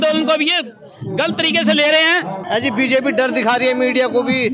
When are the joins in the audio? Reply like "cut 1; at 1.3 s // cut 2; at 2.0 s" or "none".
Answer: cut 1; at 2.4 s